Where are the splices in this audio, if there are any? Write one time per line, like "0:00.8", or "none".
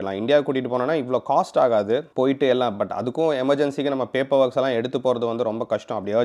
none